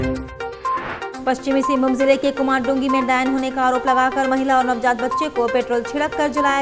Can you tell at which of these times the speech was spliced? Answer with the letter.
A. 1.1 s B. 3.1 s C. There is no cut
A